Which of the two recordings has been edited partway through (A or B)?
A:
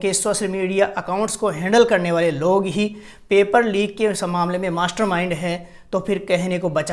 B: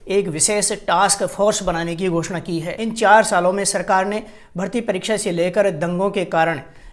B